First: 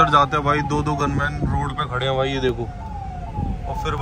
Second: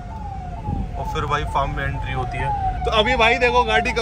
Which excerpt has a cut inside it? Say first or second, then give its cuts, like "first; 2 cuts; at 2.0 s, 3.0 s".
second; 1 cut; at 2.7 s